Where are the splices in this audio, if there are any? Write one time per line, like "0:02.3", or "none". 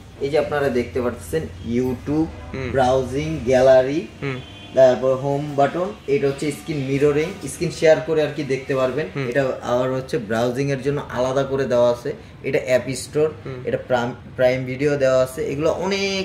none